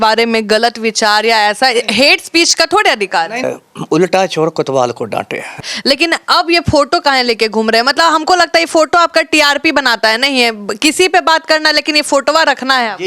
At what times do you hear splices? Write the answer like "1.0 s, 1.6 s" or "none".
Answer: 3.4 s, 5.4 s